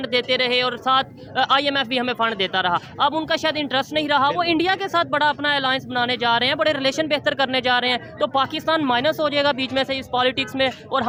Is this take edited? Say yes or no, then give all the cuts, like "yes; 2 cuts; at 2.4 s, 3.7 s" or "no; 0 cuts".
no; 0 cuts